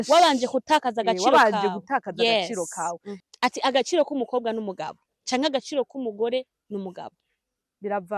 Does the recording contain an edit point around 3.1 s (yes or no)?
yes